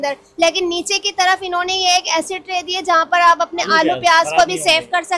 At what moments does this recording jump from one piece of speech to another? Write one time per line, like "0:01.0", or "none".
none